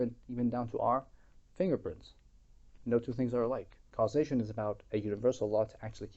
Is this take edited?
yes; 1 cut; at 3.8 s

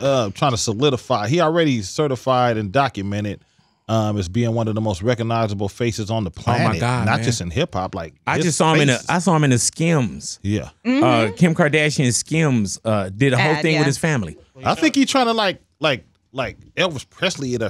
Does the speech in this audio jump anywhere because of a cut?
no; 0 cuts

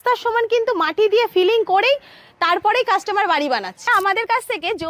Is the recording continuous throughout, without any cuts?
no; 1 cut; at 3.9 s

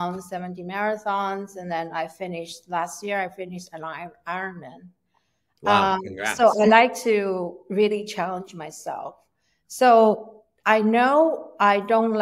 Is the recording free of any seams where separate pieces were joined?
yes; 0 cuts

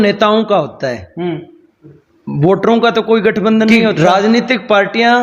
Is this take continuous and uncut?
no; 1 cut; at 4.0 s

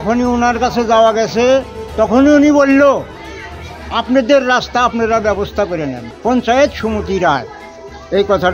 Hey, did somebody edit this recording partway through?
yes; 1 cut; at 6.0 s

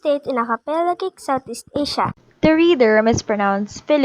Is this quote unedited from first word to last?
yes; 0 cuts

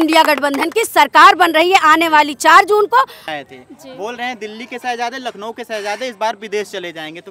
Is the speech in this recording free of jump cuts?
no; 1 cut; at 3.2 s

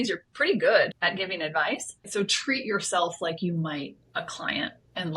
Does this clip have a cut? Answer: yes; 2 cuts; at 1.0 s, 2.1 s

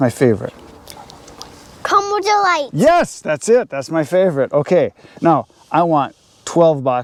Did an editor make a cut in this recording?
no; 0 cuts

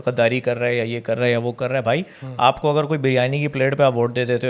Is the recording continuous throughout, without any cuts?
yes; 0 cuts

